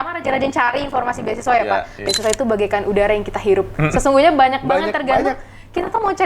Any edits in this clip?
yes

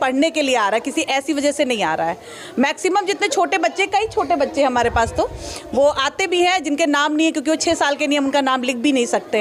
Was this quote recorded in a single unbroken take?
yes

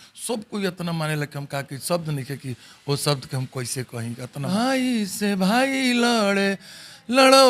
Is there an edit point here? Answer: yes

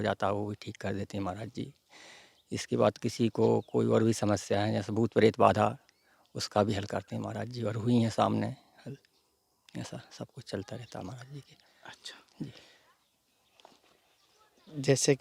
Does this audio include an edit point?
no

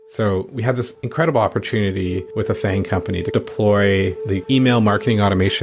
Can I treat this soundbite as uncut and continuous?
no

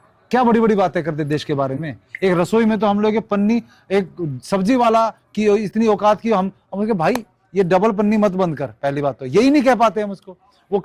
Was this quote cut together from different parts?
no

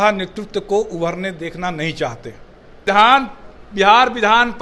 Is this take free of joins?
no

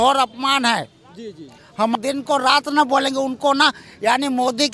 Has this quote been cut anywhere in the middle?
yes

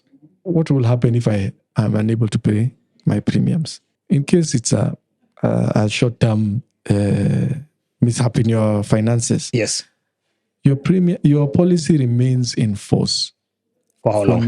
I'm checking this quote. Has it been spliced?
yes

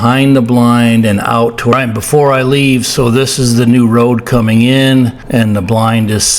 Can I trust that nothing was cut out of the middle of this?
no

